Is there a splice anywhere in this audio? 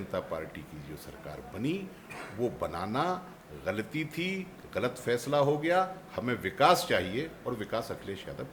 no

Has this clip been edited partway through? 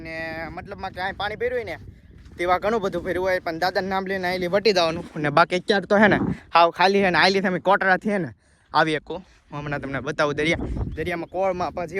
no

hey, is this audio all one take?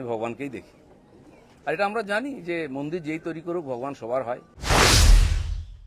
no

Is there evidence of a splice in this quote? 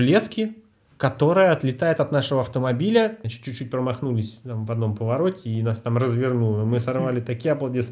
yes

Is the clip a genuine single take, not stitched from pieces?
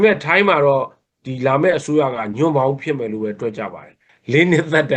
no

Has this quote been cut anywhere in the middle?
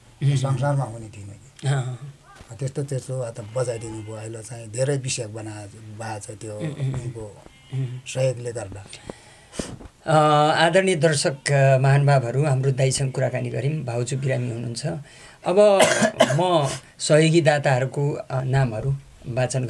no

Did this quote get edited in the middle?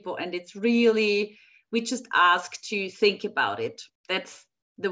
yes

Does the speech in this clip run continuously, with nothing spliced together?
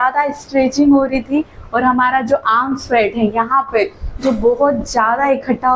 yes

